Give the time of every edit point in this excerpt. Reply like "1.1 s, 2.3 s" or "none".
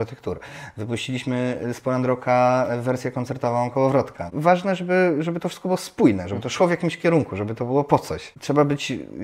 4.3 s, 8.3 s